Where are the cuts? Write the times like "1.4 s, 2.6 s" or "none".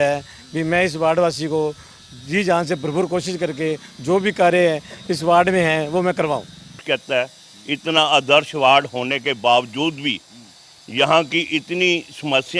6.8 s